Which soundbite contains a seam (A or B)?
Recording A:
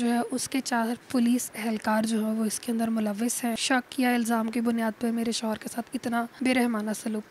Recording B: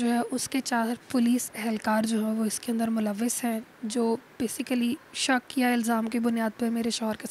A